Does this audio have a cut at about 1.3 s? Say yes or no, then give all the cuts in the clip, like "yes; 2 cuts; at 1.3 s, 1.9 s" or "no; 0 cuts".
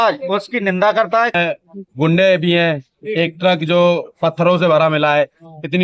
yes; 1 cut; at 1.3 s